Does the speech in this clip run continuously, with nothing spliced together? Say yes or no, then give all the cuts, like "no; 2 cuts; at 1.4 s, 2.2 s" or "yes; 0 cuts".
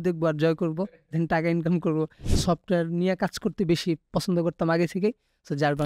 no; 1 cut; at 2.3 s